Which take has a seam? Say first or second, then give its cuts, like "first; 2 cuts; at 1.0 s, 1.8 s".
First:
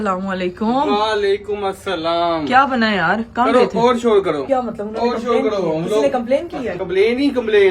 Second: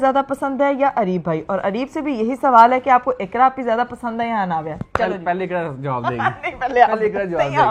first; 2 cuts; at 4.4 s, 6.8 s